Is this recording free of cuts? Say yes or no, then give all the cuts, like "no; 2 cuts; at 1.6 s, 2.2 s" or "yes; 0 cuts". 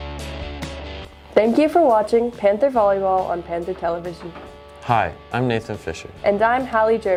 yes; 0 cuts